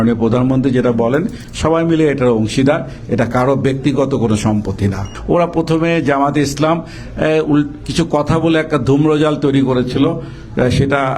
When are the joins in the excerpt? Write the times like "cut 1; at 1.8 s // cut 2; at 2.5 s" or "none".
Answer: cut 1; at 5.1 s